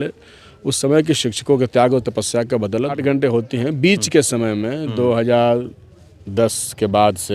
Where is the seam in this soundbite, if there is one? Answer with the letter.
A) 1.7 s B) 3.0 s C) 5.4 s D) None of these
B